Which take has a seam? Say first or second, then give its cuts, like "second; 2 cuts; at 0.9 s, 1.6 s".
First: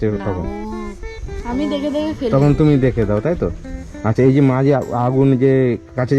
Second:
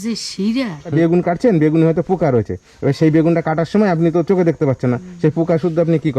second; 1 cut; at 0.9 s